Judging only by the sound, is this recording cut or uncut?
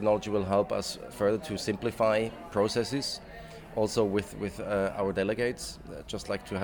uncut